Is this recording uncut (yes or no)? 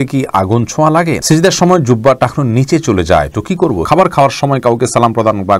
no